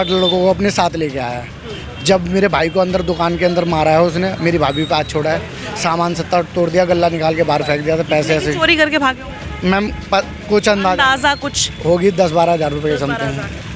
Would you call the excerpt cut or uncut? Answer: uncut